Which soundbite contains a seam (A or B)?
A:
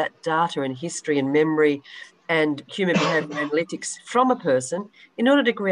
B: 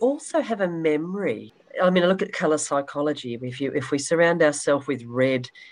B